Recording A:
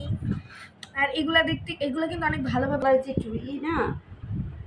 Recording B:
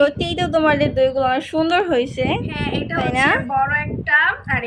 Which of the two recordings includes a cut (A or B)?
A